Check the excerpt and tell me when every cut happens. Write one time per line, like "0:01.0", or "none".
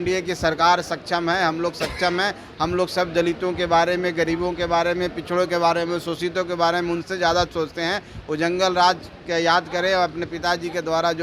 none